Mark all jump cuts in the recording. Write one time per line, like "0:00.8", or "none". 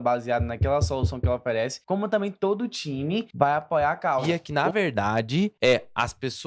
0:01.8
0:03.3
0:04.4
0:05.5